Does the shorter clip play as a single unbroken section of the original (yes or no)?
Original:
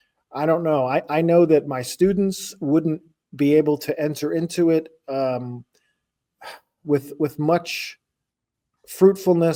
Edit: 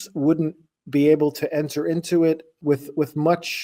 no